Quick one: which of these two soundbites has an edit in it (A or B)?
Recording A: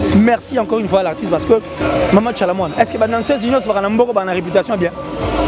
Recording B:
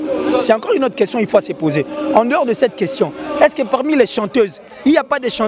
A